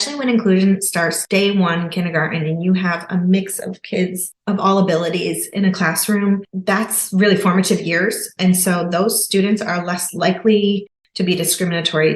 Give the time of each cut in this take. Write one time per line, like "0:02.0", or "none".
0:01.2

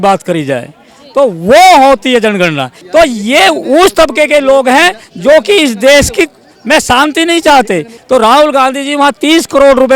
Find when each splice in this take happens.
0:02.7
0:07.9

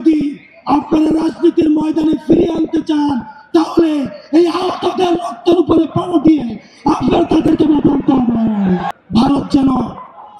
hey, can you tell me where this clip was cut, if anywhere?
0:08.9

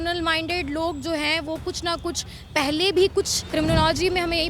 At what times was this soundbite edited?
0:03.4

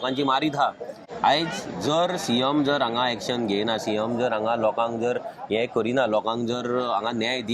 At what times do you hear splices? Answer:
none

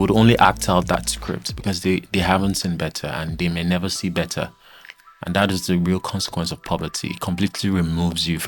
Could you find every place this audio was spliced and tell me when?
none

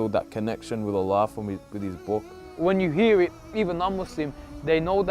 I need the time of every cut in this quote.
0:02.4

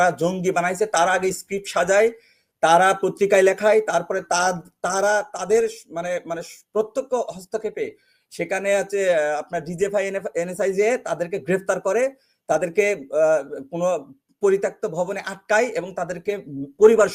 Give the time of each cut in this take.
none

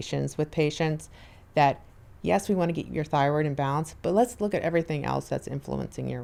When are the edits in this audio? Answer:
none

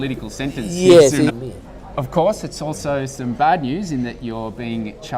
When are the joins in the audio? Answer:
none

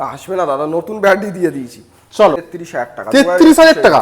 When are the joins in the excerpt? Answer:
0:02.5

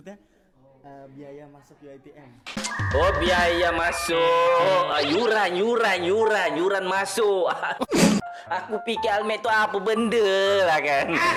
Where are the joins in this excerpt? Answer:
none

